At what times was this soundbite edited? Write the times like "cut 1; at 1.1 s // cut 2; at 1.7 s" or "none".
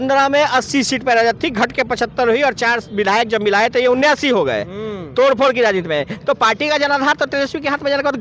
none

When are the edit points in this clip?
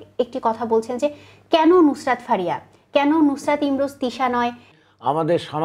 cut 1; at 4.7 s

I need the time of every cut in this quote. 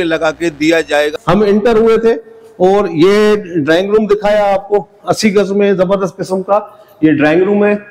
cut 1; at 1.1 s

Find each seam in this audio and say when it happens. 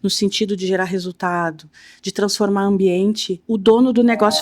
cut 1; at 3.3 s

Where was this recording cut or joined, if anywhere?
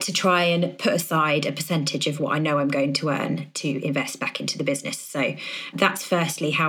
none

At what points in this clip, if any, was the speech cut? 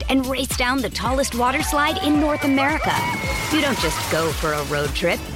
none

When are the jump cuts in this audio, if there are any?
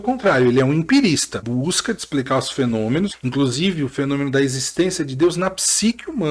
cut 1; at 1.4 s // cut 2; at 3.1 s

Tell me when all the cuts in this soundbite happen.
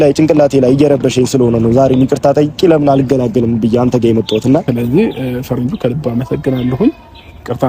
cut 1; at 4.7 s

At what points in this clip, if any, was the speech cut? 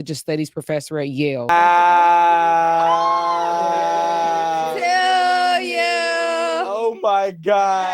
cut 1; at 1.5 s

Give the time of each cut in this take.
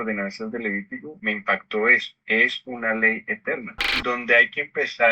cut 1; at 1.1 s // cut 2; at 2.1 s // cut 3; at 3.9 s

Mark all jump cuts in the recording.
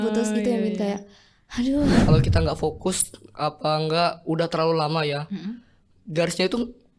cut 1; at 2.0 s

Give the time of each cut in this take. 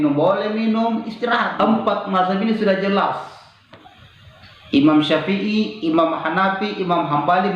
cut 1; at 1.5 s

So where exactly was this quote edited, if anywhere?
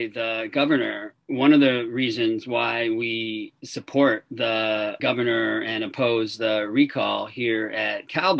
none

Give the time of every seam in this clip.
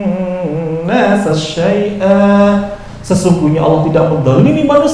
none

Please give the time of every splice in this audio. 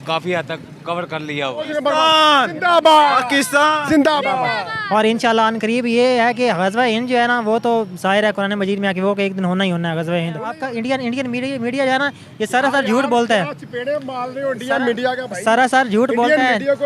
cut 1; at 1.7 s // cut 2; at 10.6 s

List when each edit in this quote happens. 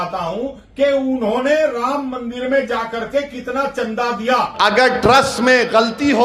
cut 1; at 4.5 s

